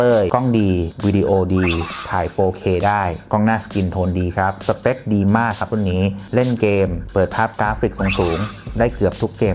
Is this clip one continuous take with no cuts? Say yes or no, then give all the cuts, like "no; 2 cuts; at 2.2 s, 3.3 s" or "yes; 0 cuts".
yes; 0 cuts